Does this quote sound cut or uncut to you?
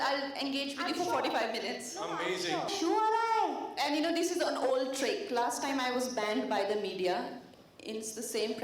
cut